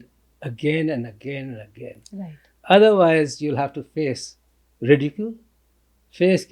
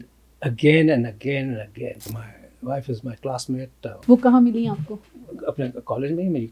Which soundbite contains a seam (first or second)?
second